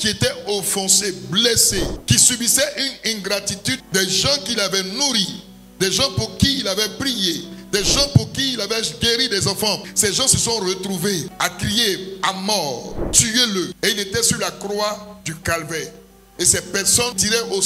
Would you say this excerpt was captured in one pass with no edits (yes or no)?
yes